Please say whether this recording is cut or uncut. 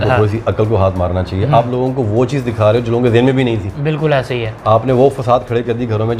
uncut